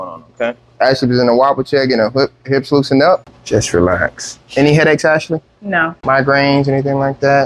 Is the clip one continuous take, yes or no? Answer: no